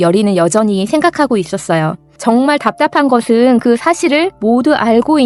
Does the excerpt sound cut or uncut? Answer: uncut